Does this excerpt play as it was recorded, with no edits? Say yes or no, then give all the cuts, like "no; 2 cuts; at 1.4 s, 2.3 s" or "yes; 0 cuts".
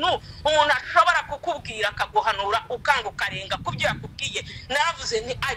yes; 0 cuts